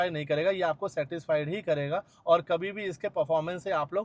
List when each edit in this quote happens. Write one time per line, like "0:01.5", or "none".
none